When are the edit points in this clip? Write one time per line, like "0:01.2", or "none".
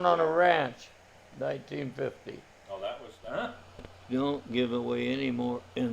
0:03.1